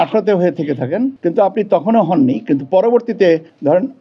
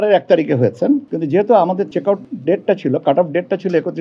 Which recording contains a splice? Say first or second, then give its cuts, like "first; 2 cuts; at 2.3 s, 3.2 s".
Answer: second; 2 cuts; at 1.1 s, 1.9 s